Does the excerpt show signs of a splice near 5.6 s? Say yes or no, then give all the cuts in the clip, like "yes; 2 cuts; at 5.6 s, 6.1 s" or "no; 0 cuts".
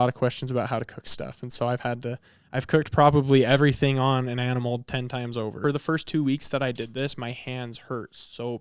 yes; 1 cut; at 5.6 s